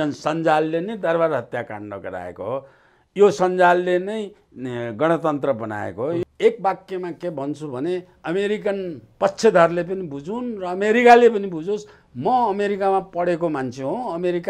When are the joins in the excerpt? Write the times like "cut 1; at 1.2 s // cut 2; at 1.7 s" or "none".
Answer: cut 1; at 6.3 s